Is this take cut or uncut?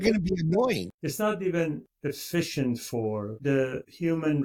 cut